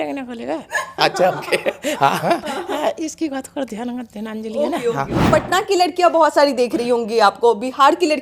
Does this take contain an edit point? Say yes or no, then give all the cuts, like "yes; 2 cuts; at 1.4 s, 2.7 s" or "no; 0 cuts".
yes; 1 cut; at 5.2 s